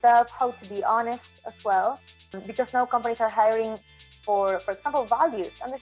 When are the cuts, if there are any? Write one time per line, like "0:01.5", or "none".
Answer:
0:02.4